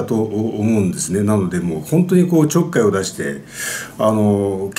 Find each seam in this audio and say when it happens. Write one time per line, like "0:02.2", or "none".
none